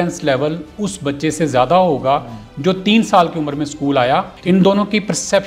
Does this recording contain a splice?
yes; 1 cut; at 4.3 s

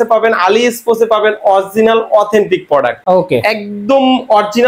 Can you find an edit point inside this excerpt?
no; 0 cuts

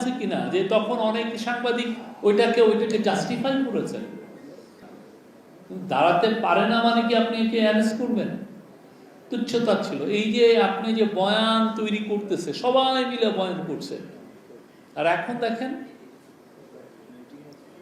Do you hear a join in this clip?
no; 0 cuts

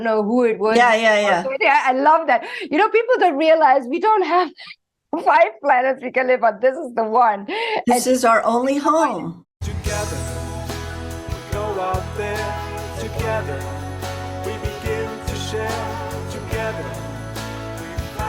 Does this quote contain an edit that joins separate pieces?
yes; 1 cut; at 9.4 s

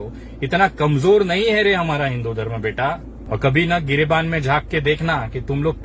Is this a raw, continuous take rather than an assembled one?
no; 1 cut; at 3.1 s

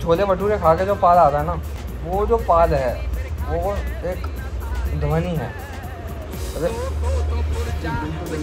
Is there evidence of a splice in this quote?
no; 0 cuts

